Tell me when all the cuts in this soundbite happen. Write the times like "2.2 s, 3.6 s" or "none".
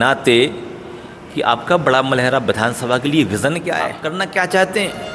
4.0 s